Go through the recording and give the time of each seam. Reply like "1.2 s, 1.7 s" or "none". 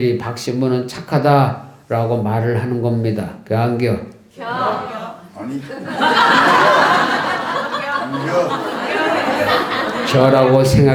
none